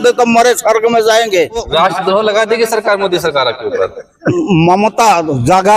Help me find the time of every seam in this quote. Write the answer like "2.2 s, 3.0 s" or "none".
1.7 s, 4.3 s